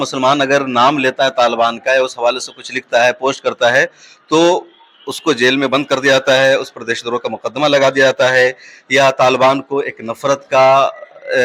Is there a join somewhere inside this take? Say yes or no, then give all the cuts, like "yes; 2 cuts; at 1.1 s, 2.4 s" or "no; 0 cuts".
no; 0 cuts